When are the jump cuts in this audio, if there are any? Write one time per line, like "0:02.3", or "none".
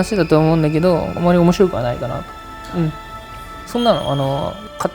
0:03.6